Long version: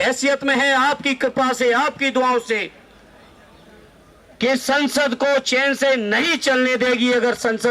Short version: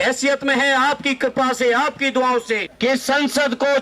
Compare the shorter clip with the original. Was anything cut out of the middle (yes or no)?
yes